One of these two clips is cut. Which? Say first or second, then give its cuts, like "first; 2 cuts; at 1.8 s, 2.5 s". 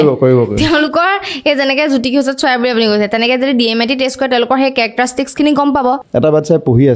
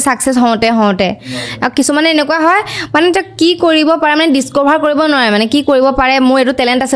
first; 1 cut; at 6.0 s